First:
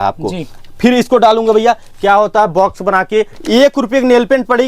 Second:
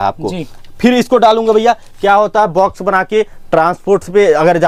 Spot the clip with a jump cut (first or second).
first